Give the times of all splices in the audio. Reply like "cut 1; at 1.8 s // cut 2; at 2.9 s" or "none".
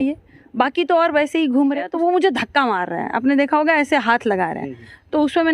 cut 1; at 1.9 s